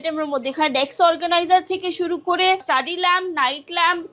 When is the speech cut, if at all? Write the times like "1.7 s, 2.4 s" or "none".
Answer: 2.6 s